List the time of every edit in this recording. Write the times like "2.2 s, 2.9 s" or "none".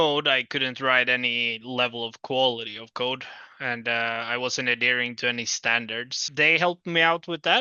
6.2 s